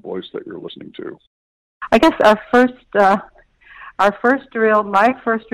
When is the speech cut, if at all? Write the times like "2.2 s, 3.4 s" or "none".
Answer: 1.7 s